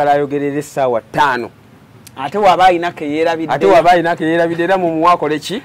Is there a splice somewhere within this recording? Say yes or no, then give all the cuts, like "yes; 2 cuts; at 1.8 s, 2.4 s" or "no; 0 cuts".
no; 0 cuts